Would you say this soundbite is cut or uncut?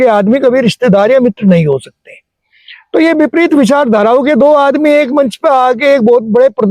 uncut